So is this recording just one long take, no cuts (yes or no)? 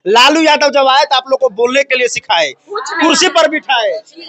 yes